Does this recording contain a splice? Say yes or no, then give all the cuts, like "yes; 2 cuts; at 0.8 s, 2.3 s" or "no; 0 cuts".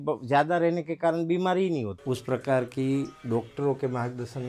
yes; 1 cut; at 2.0 s